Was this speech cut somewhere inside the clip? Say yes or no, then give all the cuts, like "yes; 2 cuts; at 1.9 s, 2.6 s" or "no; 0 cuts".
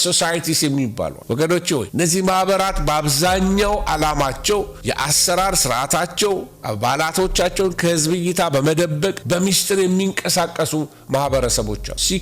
yes; 1 cut; at 1.9 s